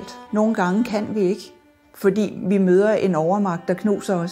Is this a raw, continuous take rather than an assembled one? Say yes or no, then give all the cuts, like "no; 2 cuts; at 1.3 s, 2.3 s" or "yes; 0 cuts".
yes; 0 cuts